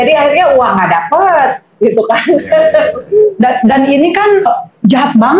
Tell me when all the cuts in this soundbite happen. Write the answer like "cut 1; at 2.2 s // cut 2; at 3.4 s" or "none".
cut 1; at 4.5 s